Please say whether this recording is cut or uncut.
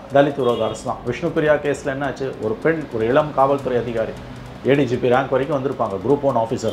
uncut